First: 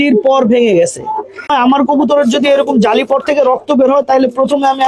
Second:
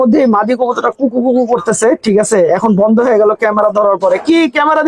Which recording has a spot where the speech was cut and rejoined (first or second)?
first